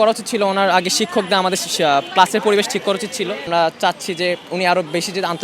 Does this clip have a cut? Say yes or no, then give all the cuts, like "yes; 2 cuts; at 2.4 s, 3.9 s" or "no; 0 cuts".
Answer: yes; 1 cut; at 3.5 s